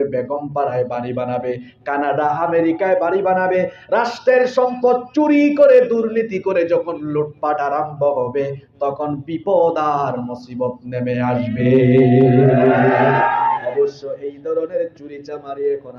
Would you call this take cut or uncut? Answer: uncut